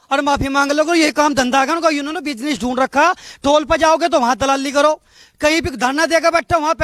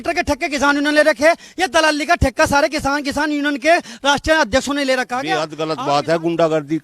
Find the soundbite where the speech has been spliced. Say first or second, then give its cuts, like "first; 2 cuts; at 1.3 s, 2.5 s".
second; 1 cut; at 5.5 s